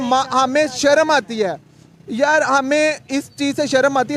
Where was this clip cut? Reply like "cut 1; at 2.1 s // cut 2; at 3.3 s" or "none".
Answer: none